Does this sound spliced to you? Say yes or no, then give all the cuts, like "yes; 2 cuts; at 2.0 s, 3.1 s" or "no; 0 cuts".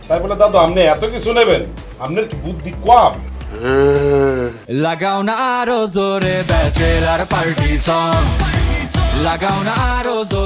yes; 1 cut; at 4.8 s